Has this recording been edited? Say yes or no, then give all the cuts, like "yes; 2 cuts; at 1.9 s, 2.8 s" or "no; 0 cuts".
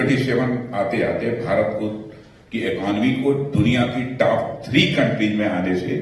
no; 0 cuts